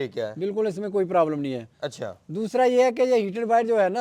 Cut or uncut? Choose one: uncut